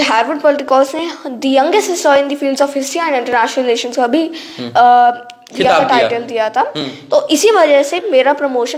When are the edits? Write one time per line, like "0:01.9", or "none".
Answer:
none